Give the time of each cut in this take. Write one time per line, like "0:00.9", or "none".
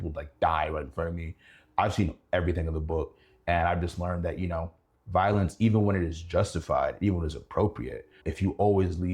0:08.2